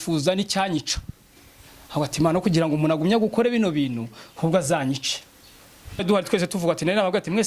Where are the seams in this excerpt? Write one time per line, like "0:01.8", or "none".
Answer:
0:06.0